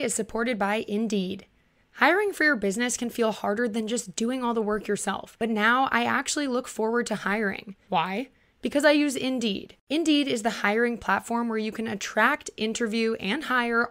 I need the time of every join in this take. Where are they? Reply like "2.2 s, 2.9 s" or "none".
none